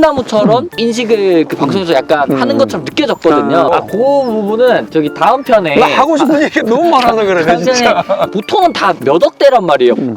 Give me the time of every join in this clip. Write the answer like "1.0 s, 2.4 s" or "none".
3.7 s, 8.3 s